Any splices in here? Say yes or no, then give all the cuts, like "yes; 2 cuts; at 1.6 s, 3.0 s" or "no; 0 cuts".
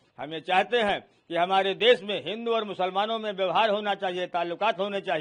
no; 0 cuts